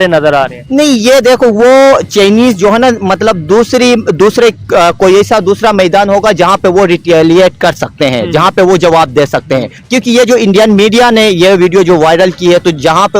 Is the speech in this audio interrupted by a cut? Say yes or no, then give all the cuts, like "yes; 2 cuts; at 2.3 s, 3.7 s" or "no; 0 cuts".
yes; 1 cut; at 9.8 s